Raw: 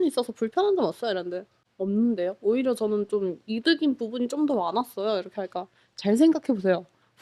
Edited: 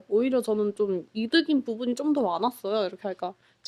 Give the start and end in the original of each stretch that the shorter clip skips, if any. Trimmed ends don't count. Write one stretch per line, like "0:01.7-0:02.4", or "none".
none

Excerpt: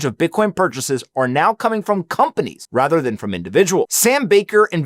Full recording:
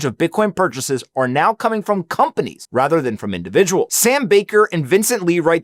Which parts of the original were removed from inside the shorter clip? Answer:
none

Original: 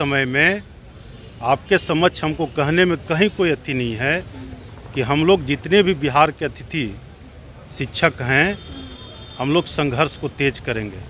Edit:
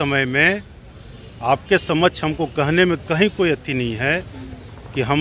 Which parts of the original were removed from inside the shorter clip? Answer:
none

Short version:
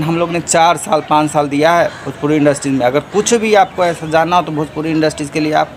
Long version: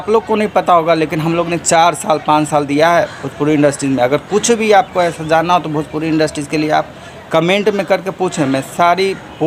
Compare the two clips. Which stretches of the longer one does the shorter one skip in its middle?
none

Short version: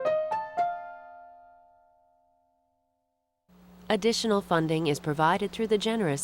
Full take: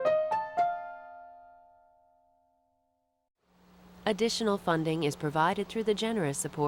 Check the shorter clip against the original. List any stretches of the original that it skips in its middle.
0:03.5-0:03.7

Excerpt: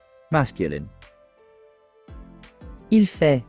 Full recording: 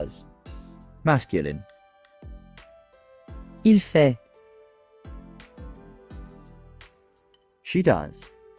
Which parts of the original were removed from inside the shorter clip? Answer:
none

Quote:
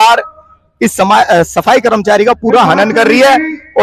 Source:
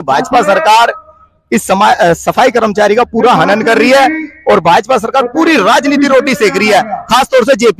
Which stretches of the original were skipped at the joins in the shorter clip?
none

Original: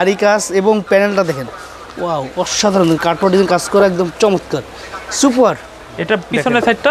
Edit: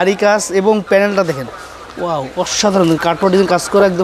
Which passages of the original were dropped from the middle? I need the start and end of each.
none

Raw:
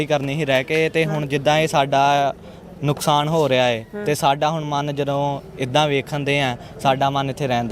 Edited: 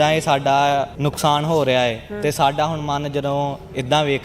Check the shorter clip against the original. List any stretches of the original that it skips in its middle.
0:02.4-0:02.8

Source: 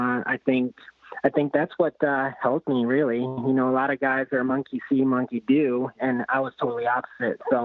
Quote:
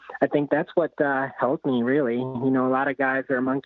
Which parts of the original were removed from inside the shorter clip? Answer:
none

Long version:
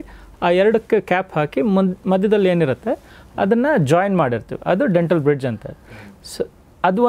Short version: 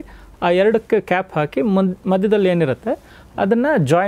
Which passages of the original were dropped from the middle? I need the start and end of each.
none

